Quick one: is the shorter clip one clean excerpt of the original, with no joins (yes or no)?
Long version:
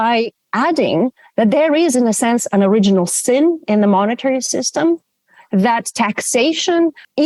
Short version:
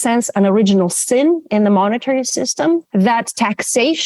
no